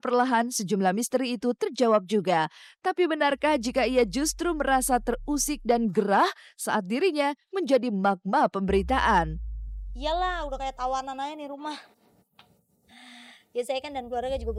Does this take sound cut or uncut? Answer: uncut